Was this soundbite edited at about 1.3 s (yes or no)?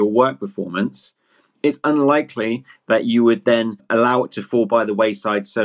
no